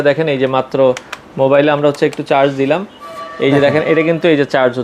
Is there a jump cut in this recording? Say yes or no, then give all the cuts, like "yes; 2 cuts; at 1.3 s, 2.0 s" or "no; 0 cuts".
no; 0 cuts